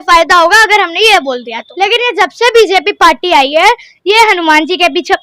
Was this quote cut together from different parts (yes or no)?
yes